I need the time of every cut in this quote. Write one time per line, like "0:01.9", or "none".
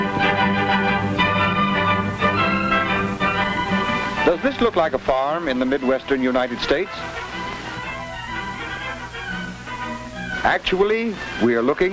0:04.0